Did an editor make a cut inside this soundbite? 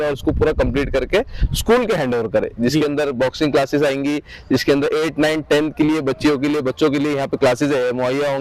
no; 0 cuts

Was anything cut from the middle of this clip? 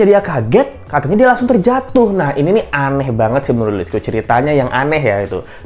no; 0 cuts

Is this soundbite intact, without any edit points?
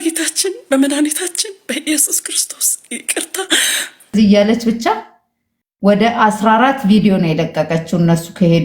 no; 1 cut; at 4.1 s

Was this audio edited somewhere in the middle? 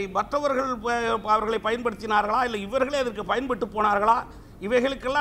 no; 0 cuts

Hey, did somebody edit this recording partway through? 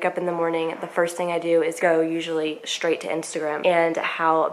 yes; 2 cuts; at 1.7 s, 3.6 s

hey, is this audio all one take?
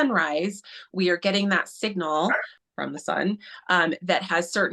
no; 1 cut; at 2.5 s

